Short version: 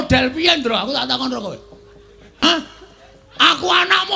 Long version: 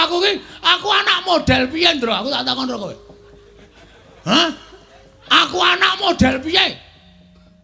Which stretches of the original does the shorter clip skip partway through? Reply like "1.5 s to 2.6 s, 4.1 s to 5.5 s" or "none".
3.8 s to 4.3 s